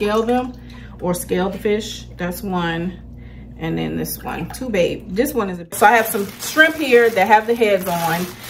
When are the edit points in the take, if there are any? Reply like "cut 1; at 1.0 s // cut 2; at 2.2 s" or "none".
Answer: cut 1; at 5.7 s